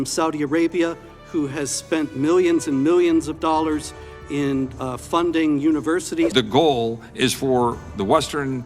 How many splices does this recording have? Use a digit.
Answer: 1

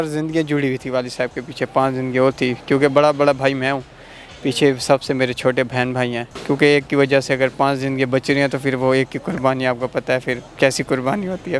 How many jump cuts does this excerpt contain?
2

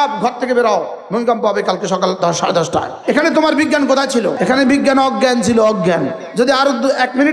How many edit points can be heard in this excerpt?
4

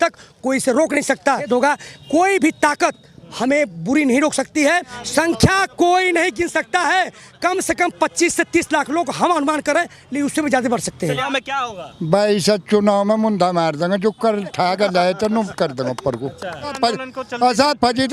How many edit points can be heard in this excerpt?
4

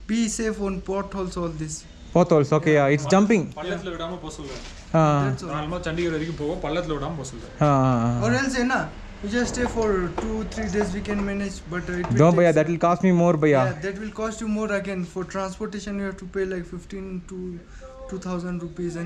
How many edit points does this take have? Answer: 0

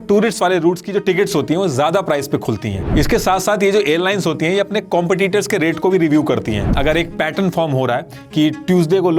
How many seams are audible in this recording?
2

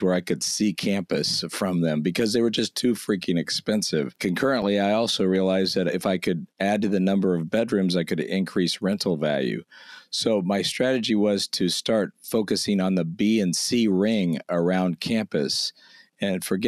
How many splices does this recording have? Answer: 1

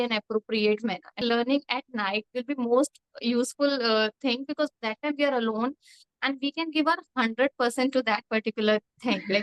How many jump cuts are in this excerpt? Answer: 1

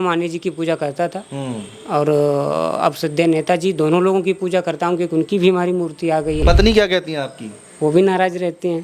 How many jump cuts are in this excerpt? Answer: 1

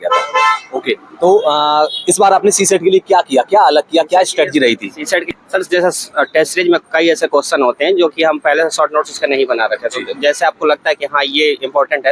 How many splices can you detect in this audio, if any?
1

